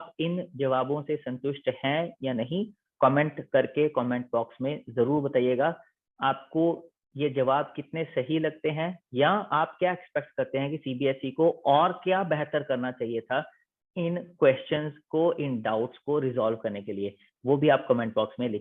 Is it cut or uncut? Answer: uncut